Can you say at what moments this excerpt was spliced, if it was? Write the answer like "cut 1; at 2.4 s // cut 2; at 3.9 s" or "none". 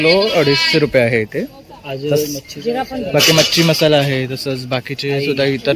none